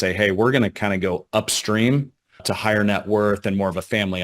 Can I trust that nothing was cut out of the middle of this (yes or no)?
no